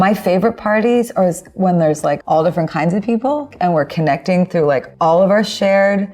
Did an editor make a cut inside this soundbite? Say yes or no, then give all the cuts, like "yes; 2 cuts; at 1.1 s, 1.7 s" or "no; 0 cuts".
yes; 3 cuts; at 2.2 s, 3.5 s, 4.9 s